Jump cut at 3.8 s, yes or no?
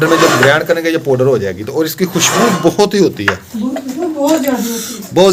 no